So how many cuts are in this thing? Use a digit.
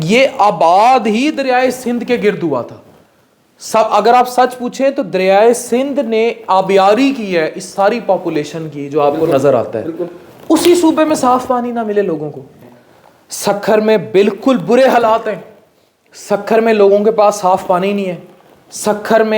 1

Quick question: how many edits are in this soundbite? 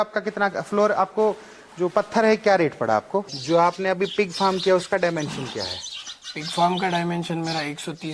1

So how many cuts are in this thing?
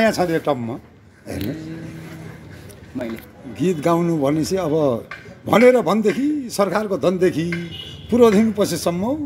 1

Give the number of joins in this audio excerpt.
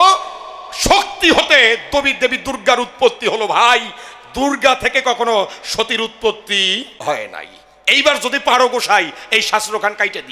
1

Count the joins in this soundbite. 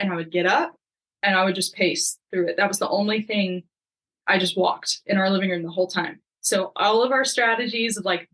0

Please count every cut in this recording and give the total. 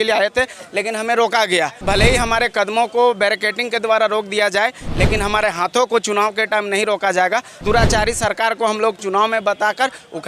2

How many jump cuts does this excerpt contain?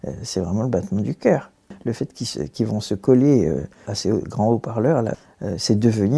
3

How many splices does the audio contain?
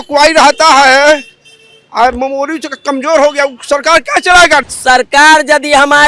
1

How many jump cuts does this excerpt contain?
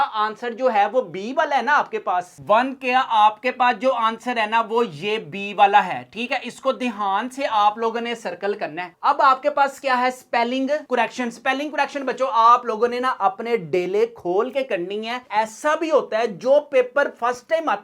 3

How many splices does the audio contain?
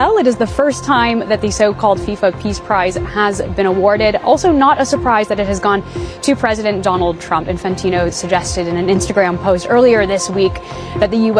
0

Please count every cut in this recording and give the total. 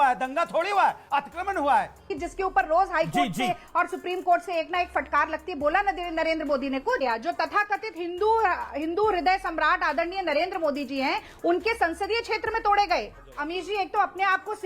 3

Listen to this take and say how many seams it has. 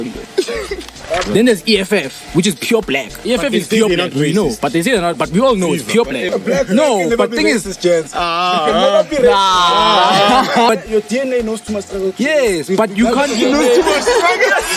4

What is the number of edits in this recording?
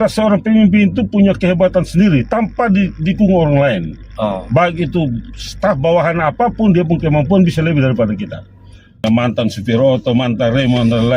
1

